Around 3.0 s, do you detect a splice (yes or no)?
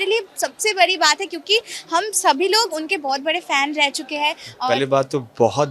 no